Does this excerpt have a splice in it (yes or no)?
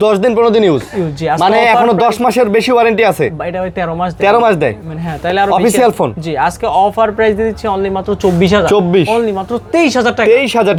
no